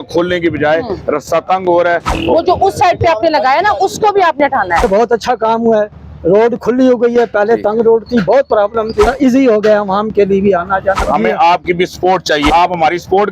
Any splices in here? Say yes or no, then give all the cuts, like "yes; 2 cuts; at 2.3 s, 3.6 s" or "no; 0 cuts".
yes; 5 cuts; at 2.1 s, 4.8 s, 9.1 s, 11.0 s, 12.5 s